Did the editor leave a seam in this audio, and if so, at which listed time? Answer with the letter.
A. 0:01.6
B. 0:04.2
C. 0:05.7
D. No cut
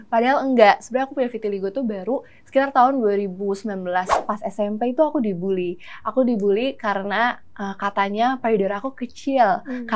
B